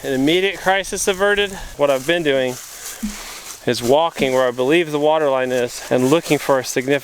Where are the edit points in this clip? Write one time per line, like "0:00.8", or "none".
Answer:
0:01.7
0:05.8